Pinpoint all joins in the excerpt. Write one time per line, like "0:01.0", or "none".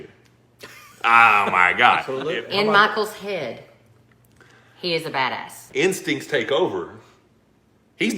0:02.1
0:05.6